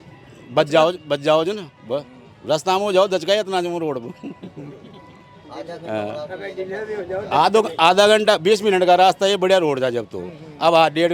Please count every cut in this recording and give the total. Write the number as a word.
zero